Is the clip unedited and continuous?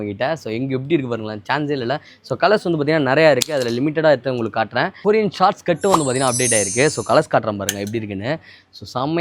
no; 1 cut; at 4.9 s

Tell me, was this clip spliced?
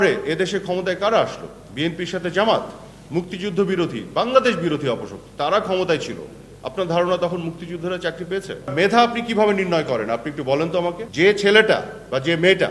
yes; 2 cuts; at 8.7 s, 11.0 s

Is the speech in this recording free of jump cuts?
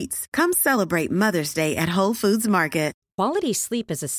no; 1 cut; at 3.0 s

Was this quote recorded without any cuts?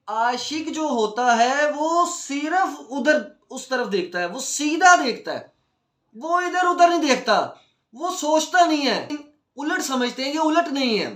no; 1 cut; at 9.2 s

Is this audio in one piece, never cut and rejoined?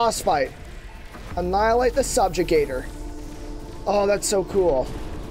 yes; 0 cuts

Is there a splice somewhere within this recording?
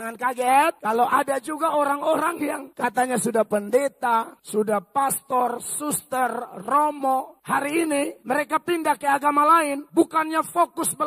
yes; 6 cuts; at 0.8 s, 2.7 s, 4.4 s, 7.3 s, 8.2 s, 9.8 s

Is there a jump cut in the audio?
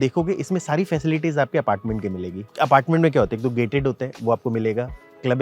yes; 1 cut; at 2.4 s

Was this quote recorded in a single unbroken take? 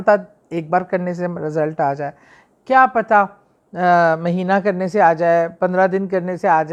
yes; 0 cuts

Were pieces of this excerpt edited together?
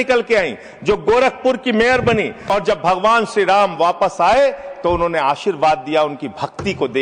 yes; 1 cut; at 2.4 s

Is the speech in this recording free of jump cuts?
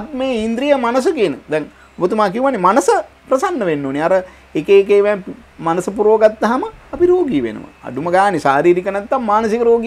yes; 0 cuts

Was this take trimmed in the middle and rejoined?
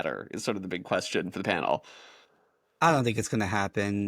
no; 0 cuts

